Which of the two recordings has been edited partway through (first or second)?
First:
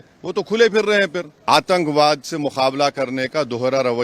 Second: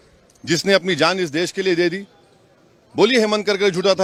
first